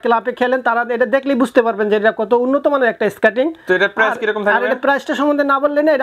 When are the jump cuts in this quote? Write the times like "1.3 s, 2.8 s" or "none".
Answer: none